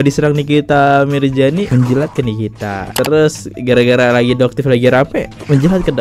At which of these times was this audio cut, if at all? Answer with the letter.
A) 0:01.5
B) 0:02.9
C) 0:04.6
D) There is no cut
B